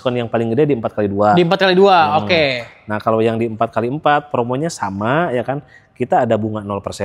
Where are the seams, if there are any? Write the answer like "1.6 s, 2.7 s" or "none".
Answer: none